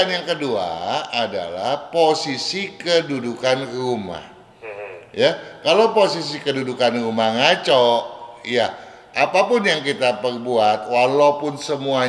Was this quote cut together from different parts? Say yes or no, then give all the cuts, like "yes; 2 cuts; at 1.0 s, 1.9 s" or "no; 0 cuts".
no; 0 cuts